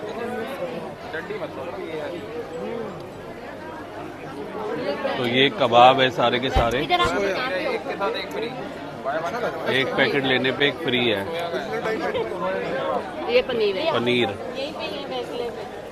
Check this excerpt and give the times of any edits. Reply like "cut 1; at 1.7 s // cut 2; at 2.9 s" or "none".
none